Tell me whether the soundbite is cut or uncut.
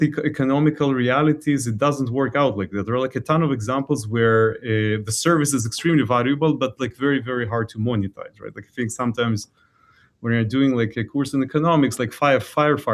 uncut